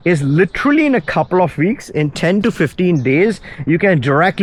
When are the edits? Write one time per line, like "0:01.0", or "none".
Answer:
none